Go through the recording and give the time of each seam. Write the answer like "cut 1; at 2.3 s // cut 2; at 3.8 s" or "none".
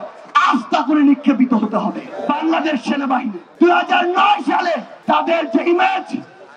cut 1; at 2.1 s // cut 2; at 3.4 s // cut 3; at 4.9 s